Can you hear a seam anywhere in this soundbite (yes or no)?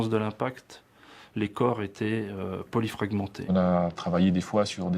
yes